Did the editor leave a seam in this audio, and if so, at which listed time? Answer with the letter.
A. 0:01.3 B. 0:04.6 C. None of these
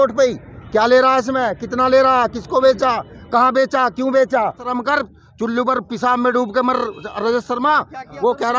B